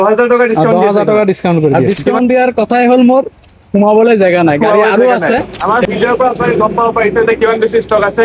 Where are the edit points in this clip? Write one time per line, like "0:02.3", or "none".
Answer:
0:01.8
0:05.5